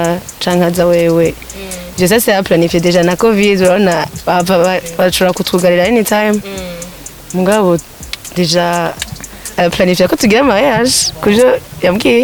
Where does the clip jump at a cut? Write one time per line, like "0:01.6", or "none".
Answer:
none